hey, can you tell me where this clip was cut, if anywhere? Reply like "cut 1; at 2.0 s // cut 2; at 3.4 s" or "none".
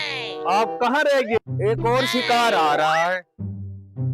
cut 1; at 1.4 s